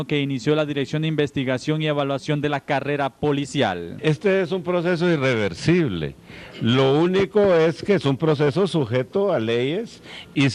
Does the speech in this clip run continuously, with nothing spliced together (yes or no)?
no